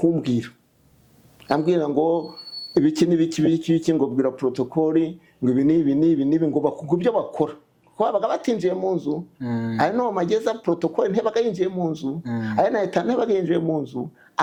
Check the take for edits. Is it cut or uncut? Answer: uncut